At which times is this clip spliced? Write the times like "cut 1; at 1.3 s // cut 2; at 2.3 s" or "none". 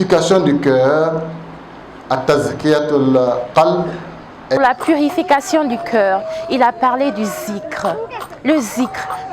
cut 1; at 4.6 s

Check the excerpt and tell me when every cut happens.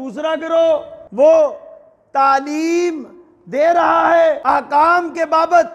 cut 1; at 1.0 s // cut 2; at 4.4 s

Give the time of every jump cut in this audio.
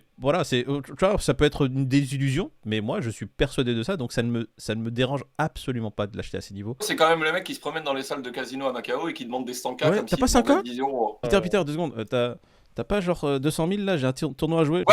cut 1; at 6.9 s

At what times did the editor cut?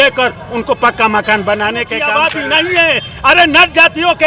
cut 1; at 2.0 s

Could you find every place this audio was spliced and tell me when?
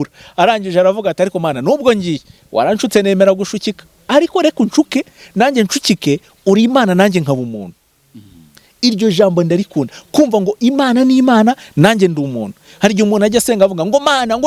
none

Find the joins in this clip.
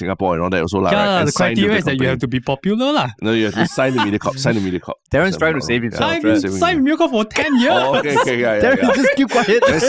none

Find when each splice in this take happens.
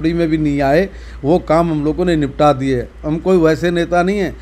none

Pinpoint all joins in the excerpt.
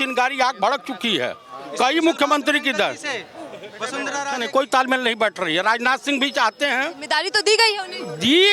none

